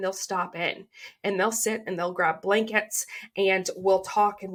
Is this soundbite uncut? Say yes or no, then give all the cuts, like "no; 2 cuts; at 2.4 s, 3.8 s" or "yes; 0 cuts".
yes; 0 cuts